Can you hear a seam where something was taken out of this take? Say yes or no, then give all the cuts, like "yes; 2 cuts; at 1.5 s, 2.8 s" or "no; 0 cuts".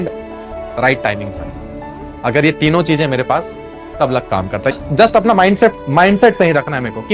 yes; 2 cuts; at 4.7 s, 5.8 s